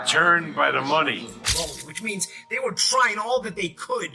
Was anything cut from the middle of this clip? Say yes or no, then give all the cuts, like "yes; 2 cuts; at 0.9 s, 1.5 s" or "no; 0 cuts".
yes; 1 cut; at 1.5 s